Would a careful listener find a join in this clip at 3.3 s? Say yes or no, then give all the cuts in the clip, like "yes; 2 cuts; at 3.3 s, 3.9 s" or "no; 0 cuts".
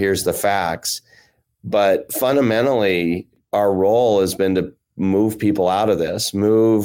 yes; 1 cut; at 3.3 s